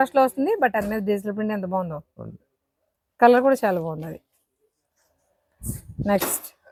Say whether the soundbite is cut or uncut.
uncut